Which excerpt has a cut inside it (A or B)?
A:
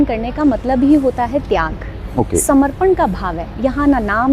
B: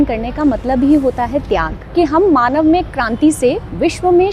B